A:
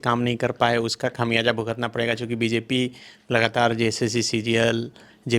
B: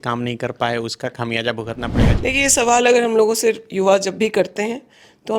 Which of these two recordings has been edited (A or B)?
B